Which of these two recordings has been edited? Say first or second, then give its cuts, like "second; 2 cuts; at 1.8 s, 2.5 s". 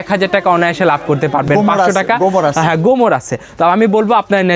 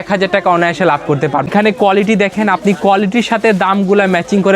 second; 1 cut; at 1.5 s